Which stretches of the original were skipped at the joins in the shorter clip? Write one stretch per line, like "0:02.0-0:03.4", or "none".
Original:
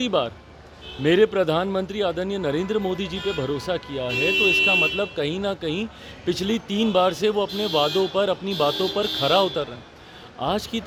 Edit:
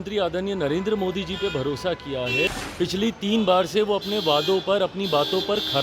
0:04.3-0:06.0